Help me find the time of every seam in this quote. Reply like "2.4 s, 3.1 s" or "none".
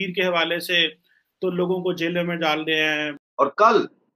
3.2 s